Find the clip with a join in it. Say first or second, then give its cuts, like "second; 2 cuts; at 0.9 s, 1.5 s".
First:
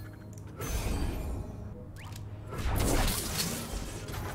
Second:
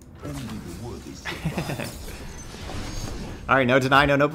first; 1 cut; at 1.7 s